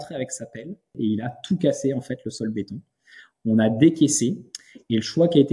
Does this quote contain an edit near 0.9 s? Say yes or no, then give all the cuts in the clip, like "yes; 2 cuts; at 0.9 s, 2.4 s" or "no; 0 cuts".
yes; 1 cut; at 0.9 s